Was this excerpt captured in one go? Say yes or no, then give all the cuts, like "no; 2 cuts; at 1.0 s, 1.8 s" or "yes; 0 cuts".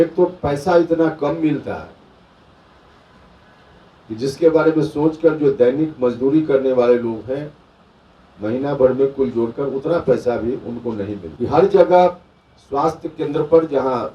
no; 1 cut; at 11.2 s